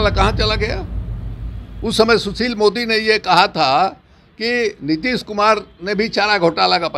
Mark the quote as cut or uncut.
uncut